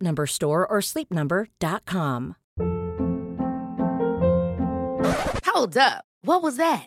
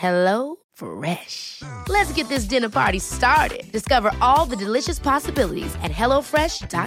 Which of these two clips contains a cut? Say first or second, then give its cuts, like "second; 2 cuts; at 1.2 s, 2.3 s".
first; 1 cut; at 2.4 s